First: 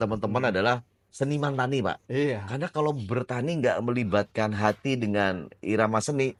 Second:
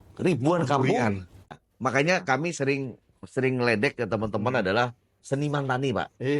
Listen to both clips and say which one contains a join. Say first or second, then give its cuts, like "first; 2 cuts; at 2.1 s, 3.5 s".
second; 1 cut; at 1.5 s